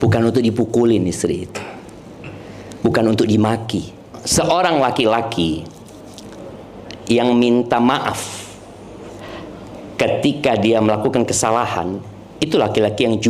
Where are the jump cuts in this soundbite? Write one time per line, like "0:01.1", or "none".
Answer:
0:04.2